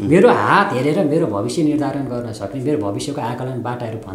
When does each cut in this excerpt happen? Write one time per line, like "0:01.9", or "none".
none